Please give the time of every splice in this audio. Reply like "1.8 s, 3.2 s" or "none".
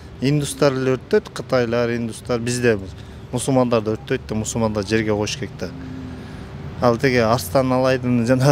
none

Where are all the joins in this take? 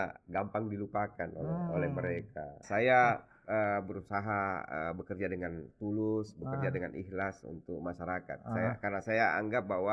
2.6 s

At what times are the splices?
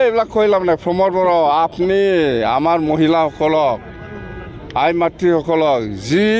none

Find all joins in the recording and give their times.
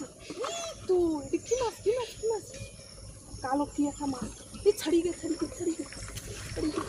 none

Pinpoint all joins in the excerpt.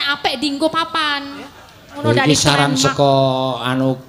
2.0 s

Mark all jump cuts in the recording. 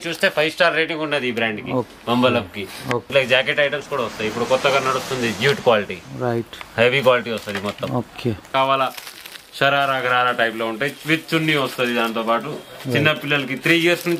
3.1 s, 8.5 s

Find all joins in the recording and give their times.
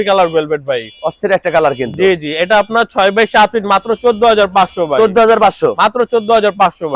none

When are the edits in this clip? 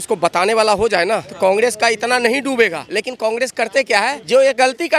1.3 s, 2.8 s, 4.2 s

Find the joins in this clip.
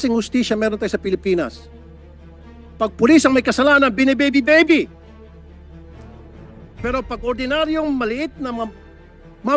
4.9 s, 6.8 s

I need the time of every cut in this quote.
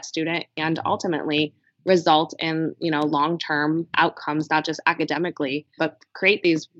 3.9 s, 5.7 s

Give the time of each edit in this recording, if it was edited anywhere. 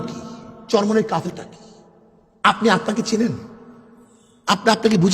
1.3 s

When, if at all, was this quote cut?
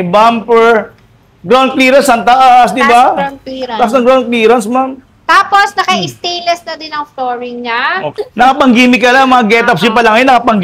8.1 s

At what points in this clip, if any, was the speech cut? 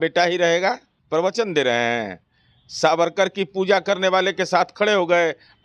0.9 s

